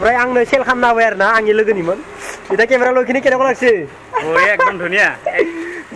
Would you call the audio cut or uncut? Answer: uncut